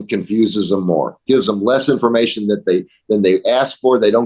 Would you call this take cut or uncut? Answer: uncut